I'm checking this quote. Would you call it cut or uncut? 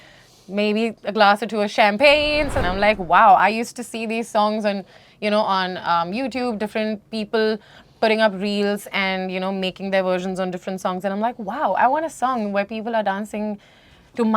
cut